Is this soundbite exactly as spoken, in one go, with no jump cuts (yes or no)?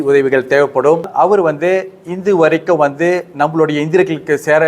no